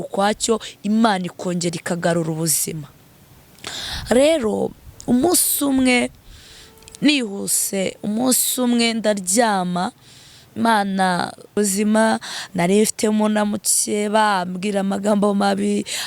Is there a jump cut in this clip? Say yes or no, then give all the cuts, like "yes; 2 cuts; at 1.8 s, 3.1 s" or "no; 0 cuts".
yes; 1 cut; at 11.6 s